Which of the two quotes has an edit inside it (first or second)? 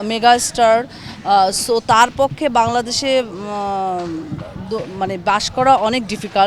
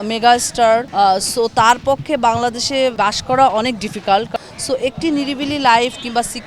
second